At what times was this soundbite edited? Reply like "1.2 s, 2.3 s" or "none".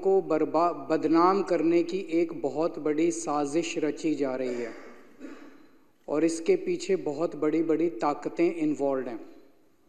none